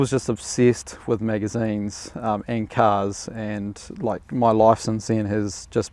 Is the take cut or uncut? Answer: uncut